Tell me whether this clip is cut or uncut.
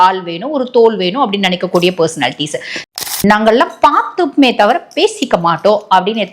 cut